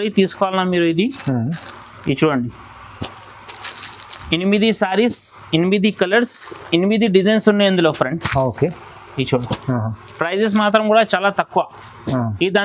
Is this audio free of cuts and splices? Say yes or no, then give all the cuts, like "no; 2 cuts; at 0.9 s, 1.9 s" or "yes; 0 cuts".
yes; 0 cuts